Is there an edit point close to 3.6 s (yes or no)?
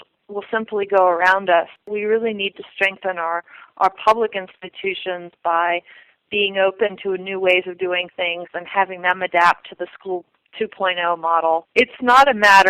no